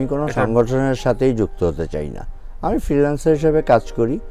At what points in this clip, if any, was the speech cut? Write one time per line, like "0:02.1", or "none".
none